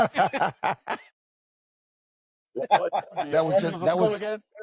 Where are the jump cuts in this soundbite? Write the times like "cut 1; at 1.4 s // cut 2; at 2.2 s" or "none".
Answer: none